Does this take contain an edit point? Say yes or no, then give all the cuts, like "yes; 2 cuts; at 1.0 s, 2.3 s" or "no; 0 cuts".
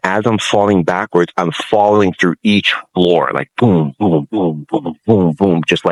no; 0 cuts